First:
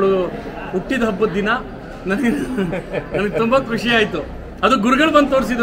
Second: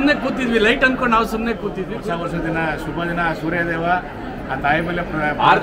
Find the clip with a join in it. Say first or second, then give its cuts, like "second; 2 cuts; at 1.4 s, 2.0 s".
second; 1 cut; at 1.9 s